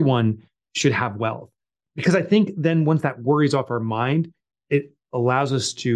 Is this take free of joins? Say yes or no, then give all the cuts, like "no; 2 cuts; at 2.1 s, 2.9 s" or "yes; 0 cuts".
yes; 0 cuts